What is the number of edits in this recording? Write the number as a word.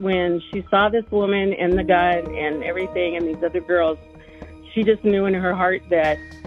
zero